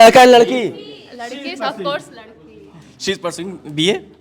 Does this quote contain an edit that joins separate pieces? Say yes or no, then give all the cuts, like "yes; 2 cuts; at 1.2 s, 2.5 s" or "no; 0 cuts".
no; 0 cuts